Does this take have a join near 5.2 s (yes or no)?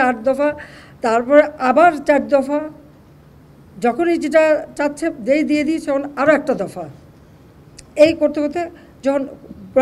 yes